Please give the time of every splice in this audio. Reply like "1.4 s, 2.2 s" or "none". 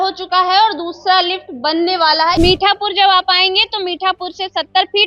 2.4 s

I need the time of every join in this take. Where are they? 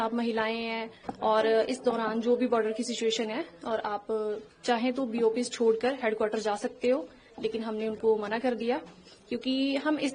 none

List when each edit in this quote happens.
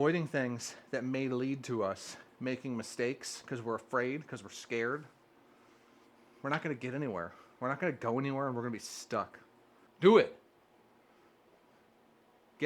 none

